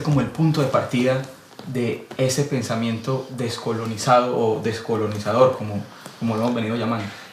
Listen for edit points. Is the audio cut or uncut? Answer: cut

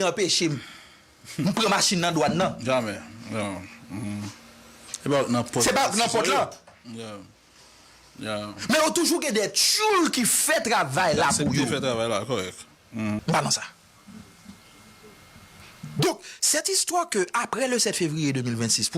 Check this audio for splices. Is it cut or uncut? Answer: cut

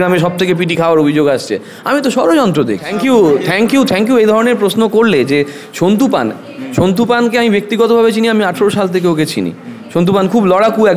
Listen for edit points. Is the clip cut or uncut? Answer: cut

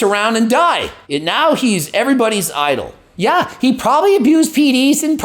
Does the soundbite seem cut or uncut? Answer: cut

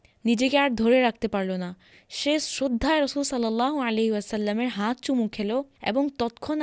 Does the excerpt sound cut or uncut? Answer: uncut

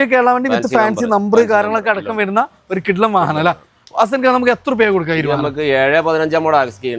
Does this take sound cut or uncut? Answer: uncut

